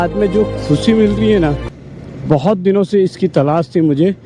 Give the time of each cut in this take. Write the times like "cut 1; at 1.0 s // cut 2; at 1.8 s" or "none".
none